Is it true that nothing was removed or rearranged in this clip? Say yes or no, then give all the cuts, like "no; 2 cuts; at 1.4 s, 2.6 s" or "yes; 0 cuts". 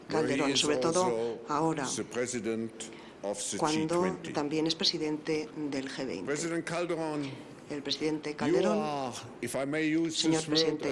no; 1 cut; at 4.8 s